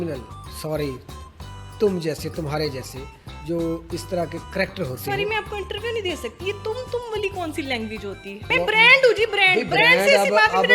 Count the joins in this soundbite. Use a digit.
1